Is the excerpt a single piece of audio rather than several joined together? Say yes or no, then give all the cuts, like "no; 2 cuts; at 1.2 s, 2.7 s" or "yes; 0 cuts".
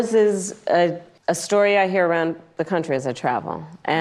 no; 1 cut; at 1.1 s